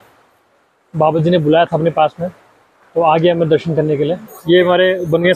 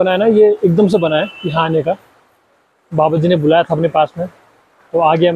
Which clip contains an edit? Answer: first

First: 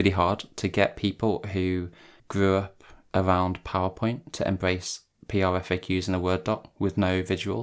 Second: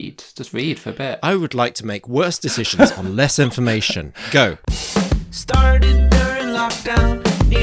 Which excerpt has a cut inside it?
second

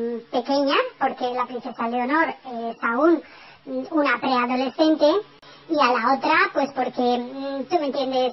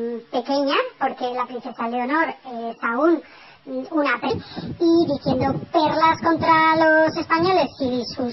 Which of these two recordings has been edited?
first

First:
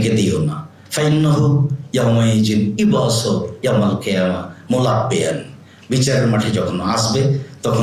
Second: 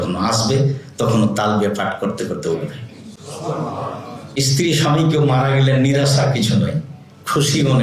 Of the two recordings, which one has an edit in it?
second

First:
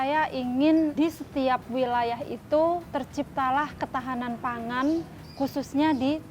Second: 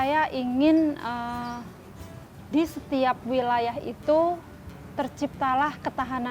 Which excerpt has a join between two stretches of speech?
first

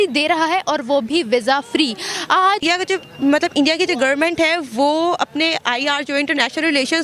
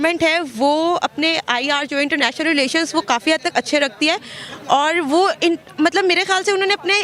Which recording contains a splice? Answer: first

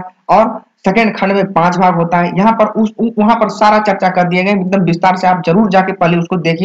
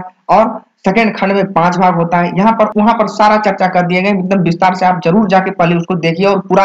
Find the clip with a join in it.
second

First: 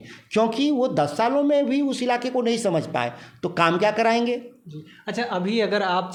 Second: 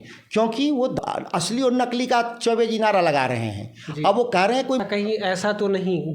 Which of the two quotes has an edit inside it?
second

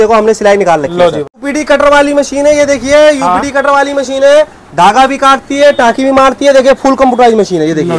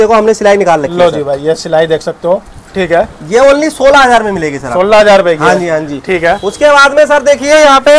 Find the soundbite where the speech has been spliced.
first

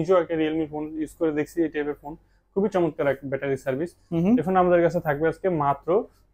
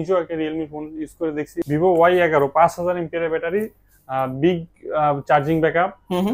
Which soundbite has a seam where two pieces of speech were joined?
second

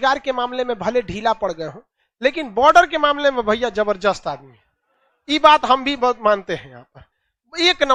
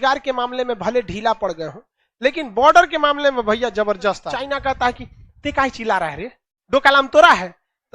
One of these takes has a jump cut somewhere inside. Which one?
second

